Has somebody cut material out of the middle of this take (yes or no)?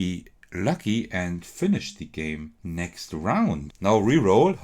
yes